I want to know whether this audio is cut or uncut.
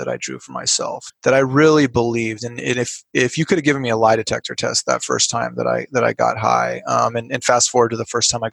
cut